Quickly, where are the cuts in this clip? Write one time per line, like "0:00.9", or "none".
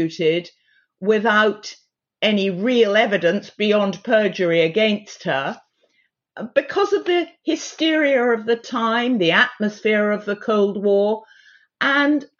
none

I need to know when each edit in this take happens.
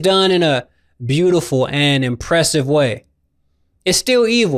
none

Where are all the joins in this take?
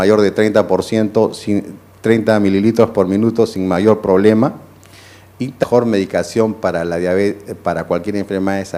none

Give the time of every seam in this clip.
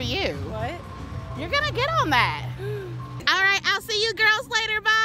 0:03.1

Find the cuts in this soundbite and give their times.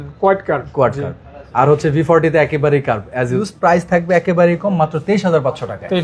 0:03.4

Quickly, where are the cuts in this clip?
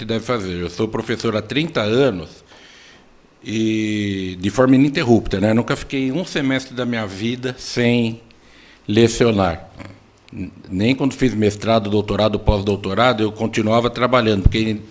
0:01.5

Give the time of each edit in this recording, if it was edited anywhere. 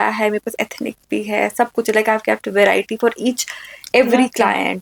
none

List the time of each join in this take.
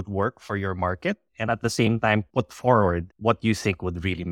0:02.3
0:03.1

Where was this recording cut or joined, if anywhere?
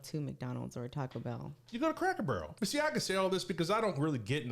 0:02.5

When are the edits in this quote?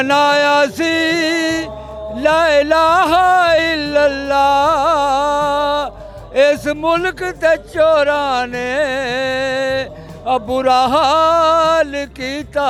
none

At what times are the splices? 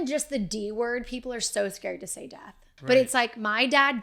0:02.7

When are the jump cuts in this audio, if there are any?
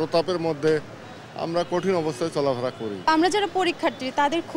0:03.1

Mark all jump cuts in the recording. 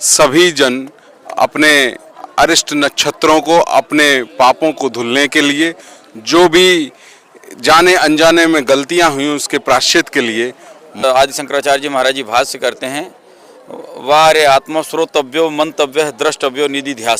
0:11.0

